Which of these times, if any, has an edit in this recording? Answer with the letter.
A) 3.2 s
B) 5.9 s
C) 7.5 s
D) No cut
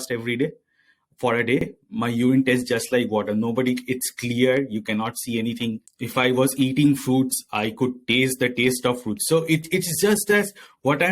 B